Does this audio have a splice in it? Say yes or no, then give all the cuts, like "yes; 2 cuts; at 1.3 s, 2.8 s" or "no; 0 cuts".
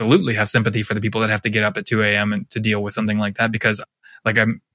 no; 0 cuts